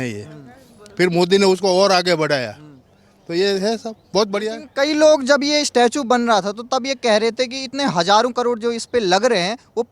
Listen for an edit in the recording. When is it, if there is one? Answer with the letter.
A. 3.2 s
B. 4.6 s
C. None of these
C